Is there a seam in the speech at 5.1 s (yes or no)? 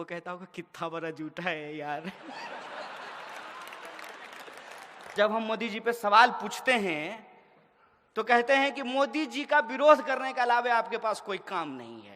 yes